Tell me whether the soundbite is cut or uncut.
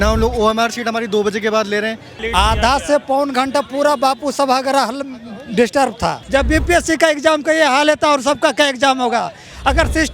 cut